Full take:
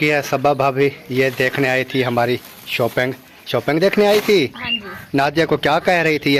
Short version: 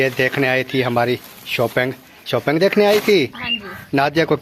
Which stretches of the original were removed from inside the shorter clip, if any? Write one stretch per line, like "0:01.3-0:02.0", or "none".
none